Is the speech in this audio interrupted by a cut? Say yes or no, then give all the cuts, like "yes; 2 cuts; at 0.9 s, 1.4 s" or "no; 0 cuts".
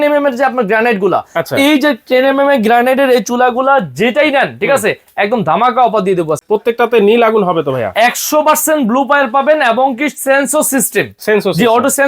yes; 1 cut; at 6.4 s